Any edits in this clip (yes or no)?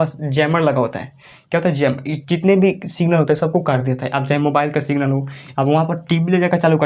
no